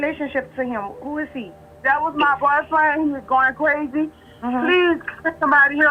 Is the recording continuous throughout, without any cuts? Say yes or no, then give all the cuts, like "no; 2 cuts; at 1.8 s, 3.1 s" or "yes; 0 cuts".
yes; 0 cuts